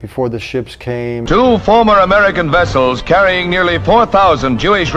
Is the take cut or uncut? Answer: uncut